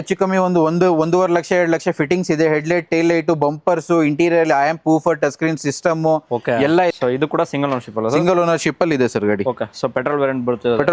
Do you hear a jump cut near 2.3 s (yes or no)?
no